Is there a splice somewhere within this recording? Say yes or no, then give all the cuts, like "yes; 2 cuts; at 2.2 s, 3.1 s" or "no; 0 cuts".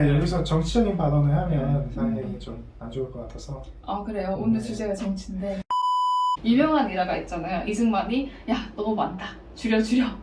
yes; 1 cut; at 6.4 s